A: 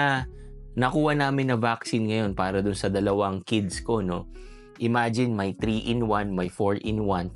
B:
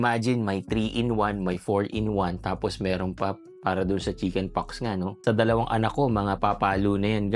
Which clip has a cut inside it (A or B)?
B